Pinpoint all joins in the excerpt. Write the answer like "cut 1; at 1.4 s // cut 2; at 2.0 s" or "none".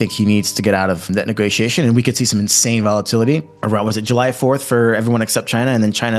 cut 1; at 1.1 s